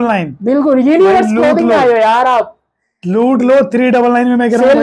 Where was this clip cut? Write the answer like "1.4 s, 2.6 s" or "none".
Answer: none